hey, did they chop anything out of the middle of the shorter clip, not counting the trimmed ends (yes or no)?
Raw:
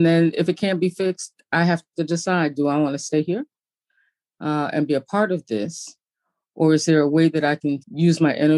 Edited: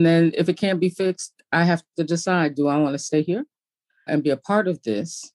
yes